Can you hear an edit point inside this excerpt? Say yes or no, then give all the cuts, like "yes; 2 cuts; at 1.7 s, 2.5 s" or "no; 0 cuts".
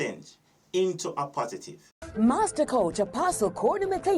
yes; 1 cut; at 1.9 s